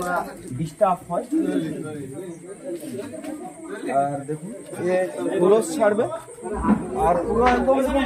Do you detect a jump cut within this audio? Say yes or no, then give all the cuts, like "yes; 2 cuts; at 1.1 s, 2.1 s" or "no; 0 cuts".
no; 0 cuts